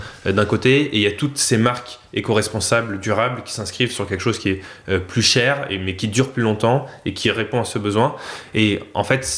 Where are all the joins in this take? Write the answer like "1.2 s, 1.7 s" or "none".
none